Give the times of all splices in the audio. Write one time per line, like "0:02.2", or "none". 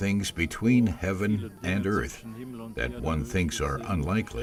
none